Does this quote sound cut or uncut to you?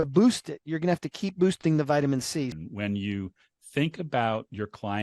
cut